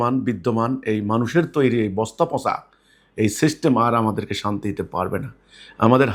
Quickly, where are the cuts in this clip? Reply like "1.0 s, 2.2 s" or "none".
none